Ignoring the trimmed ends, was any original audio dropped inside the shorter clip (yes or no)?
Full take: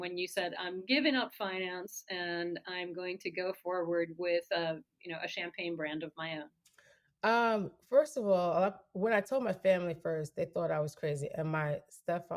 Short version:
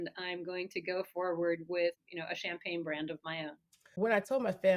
yes